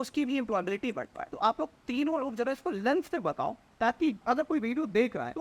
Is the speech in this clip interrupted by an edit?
yes; 1 cut; at 4.2 s

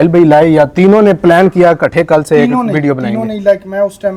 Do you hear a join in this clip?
no; 0 cuts

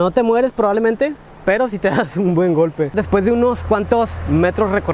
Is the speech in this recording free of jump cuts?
no; 1 cut; at 2.9 s

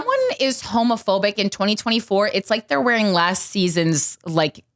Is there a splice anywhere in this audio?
yes; 1 cut; at 1.4 s

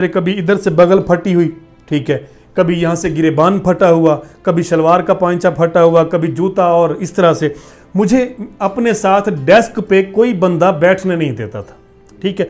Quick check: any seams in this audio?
no; 0 cuts

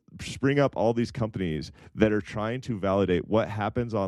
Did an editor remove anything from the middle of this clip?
no; 0 cuts

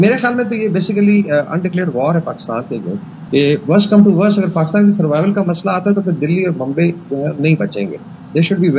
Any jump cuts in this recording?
yes; 1 cut; at 3.1 s

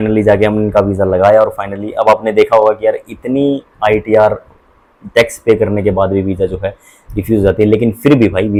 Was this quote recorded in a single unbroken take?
yes; 0 cuts

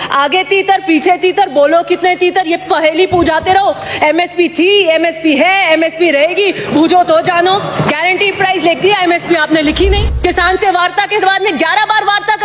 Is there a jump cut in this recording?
yes; 1 cut; at 10.1 s

